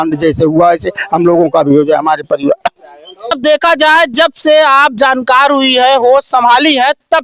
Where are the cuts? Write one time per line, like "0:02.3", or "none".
0:03.4